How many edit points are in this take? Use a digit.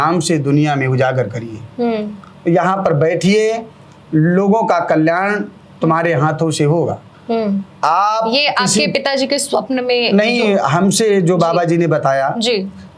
0